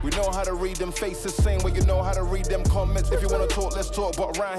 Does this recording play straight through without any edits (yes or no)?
yes